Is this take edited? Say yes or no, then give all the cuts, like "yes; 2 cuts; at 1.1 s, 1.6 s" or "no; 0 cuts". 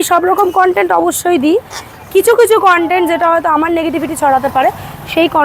no; 0 cuts